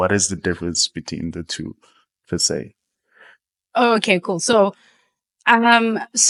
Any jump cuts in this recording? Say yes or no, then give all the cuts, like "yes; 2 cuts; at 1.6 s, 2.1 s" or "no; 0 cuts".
no; 0 cuts